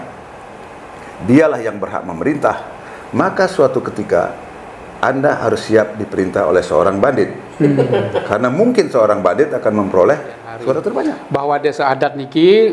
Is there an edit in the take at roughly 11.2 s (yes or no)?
yes